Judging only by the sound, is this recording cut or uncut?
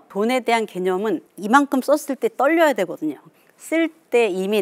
cut